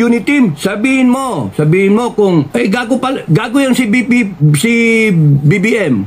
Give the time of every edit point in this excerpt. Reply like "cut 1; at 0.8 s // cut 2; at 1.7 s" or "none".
cut 1; at 2.5 s